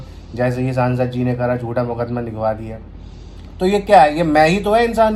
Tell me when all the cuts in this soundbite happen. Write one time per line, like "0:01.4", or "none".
none